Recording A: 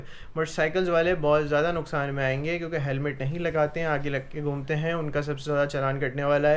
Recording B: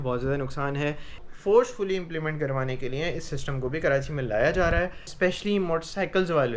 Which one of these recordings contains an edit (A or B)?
B